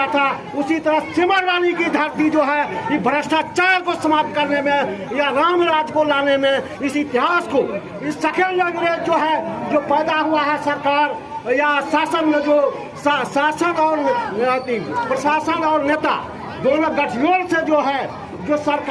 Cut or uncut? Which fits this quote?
uncut